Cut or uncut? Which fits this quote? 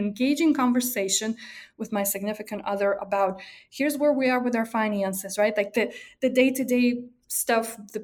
uncut